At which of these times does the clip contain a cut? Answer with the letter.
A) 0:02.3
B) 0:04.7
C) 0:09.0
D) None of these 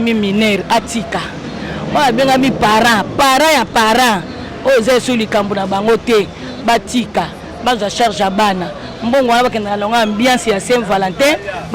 D